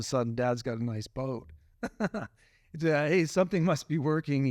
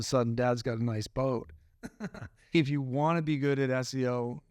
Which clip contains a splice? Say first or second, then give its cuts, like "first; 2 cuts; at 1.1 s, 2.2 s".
second; 1 cut; at 2.5 s